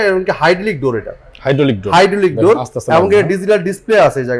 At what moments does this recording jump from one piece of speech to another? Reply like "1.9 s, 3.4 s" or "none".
none